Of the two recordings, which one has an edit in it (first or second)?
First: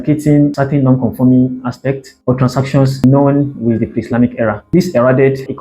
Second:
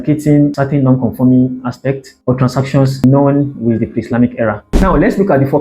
second